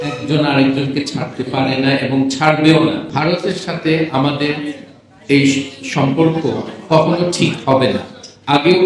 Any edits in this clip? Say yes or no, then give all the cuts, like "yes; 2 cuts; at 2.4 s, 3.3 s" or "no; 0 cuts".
yes; 1 cut; at 3.1 s